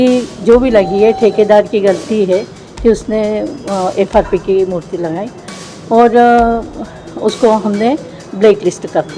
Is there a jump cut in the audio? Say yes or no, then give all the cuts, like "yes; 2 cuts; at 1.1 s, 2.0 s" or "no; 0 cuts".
no; 0 cuts